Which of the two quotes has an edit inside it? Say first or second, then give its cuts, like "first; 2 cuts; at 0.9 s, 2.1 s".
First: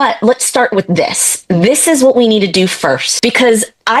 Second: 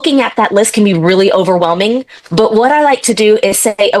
first; 1 cut; at 3.1 s